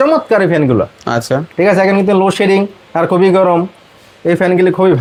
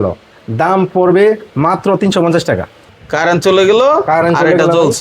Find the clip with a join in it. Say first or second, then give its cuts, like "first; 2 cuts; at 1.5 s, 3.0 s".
second; 1 cut; at 2.8 s